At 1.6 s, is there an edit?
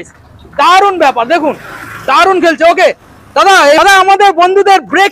no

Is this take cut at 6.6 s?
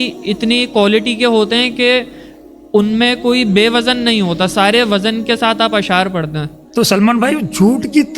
yes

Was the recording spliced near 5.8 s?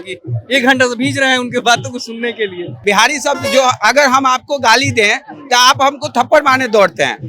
no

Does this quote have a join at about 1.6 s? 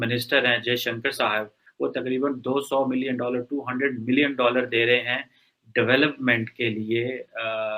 yes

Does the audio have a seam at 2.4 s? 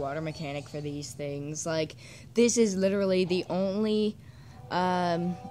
no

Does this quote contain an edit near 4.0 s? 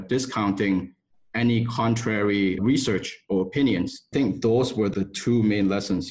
yes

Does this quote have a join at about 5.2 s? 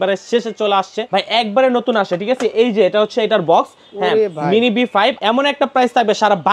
yes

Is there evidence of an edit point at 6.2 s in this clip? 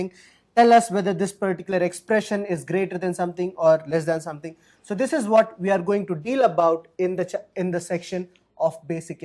yes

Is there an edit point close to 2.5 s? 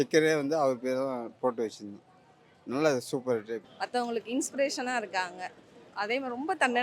no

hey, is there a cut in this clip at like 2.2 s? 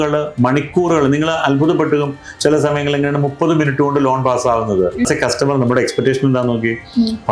no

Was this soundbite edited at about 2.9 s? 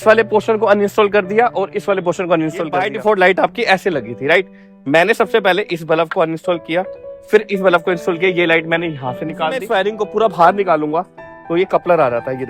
yes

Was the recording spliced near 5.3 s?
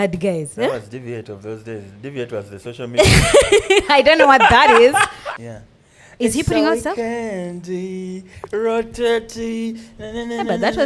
yes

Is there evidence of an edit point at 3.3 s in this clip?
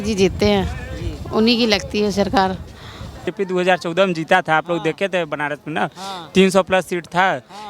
yes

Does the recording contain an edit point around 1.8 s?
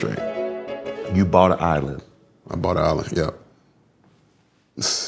no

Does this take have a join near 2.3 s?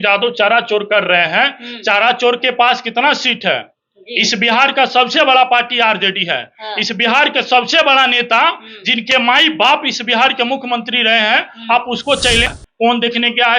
no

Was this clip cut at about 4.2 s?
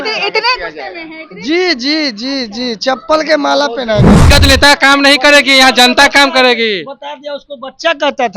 yes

